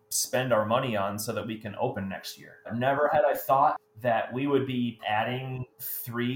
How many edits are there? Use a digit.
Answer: 3